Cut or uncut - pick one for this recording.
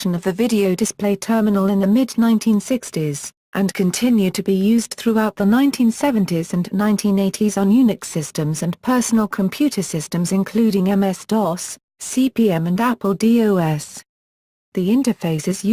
uncut